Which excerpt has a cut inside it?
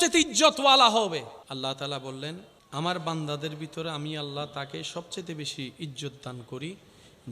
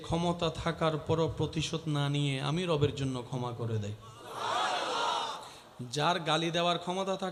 first; 2 cuts; at 1.4 s, 2.5 s

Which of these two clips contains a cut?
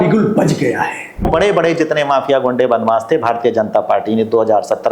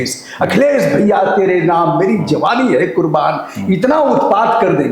first; 1 cut; at 1.3 s

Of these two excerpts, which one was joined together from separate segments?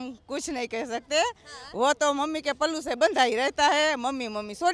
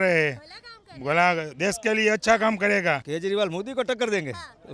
second; 1 cut; at 3.0 s

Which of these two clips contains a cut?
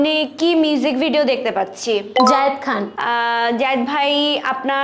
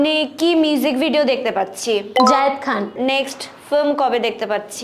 second; 1 cut; at 2.9 s

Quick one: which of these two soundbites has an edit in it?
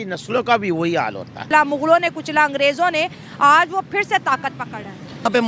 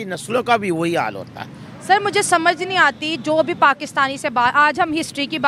first; 1 cut; at 1.4 s

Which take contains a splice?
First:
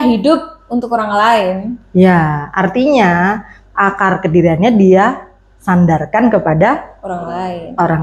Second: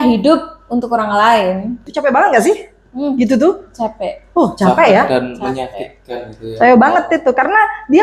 second; 1 cut; at 1.8 s

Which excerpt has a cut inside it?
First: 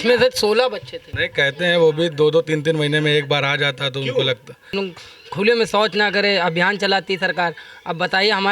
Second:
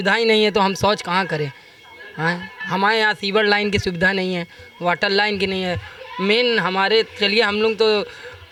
first; 2 cuts; at 1.2 s, 4.7 s

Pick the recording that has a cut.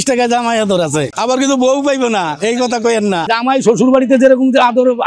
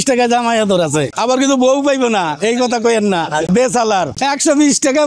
first; 1 cut; at 3.3 s

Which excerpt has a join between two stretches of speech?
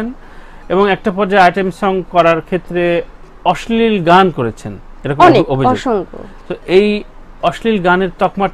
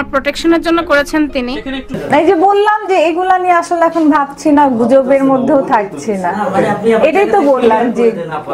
second; 1 cut; at 2.0 s

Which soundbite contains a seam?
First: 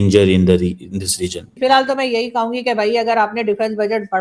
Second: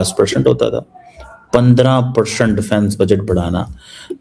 first; 1 cut; at 1.5 s

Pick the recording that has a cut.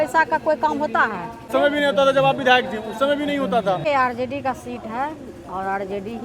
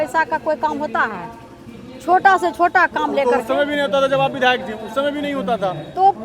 first; 2 cuts; at 1.5 s, 3.8 s

